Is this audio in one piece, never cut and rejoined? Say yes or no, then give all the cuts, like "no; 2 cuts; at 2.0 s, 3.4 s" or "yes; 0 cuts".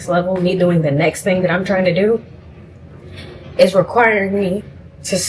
yes; 0 cuts